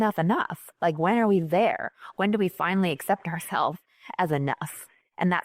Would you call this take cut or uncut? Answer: uncut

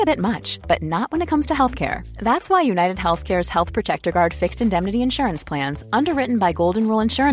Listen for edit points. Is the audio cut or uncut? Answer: uncut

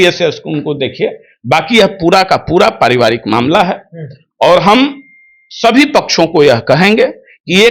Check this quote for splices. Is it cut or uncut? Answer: uncut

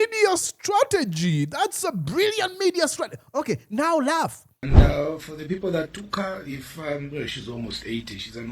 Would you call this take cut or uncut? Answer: cut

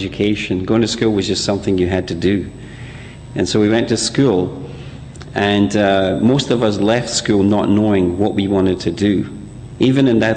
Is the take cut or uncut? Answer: cut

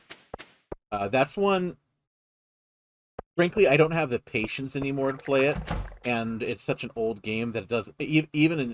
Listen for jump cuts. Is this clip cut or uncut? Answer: uncut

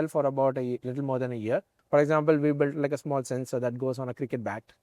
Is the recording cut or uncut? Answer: cut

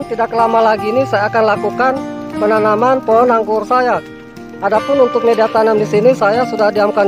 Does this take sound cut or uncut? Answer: uncut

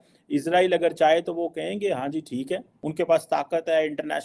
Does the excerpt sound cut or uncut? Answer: cut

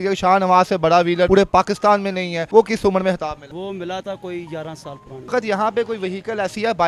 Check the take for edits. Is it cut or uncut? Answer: cut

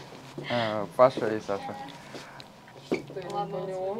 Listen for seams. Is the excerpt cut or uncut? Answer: uncut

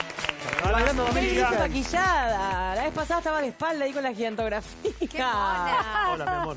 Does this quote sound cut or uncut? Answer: uncut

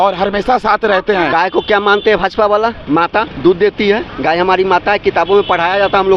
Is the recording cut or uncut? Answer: cut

